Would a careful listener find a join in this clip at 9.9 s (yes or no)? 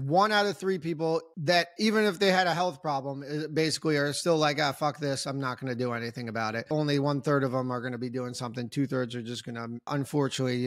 yes